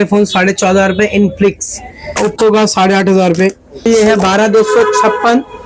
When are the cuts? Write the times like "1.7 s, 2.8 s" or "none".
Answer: 2.2 s, 3.8 s